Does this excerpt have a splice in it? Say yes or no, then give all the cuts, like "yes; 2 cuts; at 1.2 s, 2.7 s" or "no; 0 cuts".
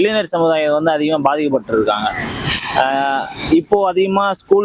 no; 0 cuts